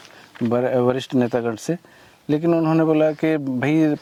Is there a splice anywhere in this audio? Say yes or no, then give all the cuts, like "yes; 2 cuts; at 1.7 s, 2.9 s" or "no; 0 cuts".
no; 0 cuts